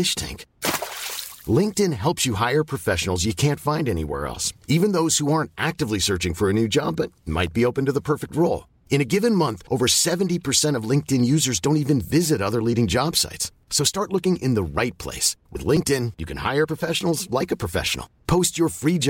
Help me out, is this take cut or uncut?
uncut